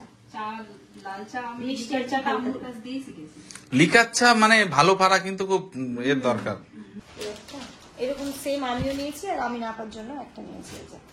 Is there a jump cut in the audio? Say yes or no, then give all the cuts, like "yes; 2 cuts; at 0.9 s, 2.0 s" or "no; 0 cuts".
yes; 1 cut; at 6.9 s